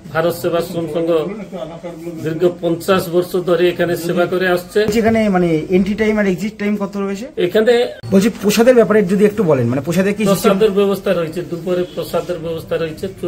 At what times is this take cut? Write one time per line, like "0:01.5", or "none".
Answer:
0:04.9
0:08.0